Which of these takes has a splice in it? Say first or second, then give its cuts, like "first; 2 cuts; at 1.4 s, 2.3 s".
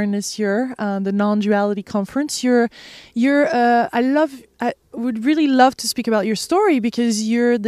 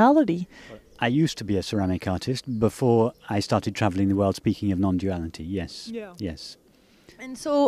second; 1 cut; at 4.2 s